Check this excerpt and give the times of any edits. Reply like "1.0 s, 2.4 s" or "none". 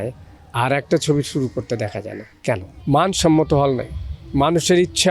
2.7 s